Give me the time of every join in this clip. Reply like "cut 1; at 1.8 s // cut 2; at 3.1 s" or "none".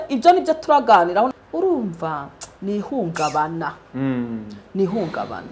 cut 1; at 1.3 s